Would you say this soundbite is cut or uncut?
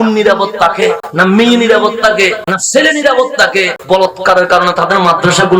cut